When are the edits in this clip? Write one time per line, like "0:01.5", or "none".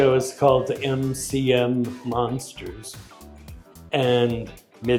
none